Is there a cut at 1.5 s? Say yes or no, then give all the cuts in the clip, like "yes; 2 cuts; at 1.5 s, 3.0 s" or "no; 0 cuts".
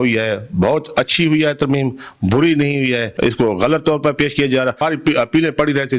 no; 2 cuts; at 3.1 s, 4.8 s